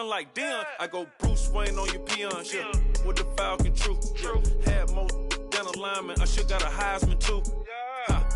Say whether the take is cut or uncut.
uncut